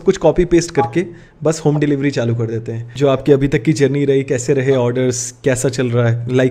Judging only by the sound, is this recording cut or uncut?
cut